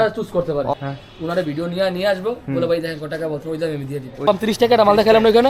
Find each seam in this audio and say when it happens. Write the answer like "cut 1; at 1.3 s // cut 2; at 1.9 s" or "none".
cut 1; at 0.7 s // cut 2; at 4.3 s